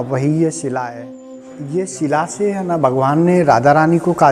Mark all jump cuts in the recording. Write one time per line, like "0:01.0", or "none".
0:01.4